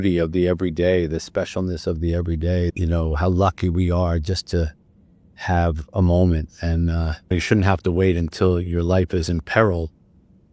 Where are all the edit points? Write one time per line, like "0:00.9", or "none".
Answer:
0:02.7
0:07.3